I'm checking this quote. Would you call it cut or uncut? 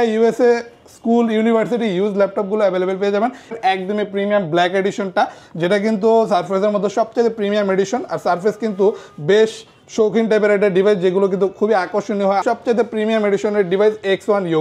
cut